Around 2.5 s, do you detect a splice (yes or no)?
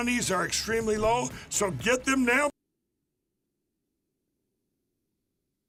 no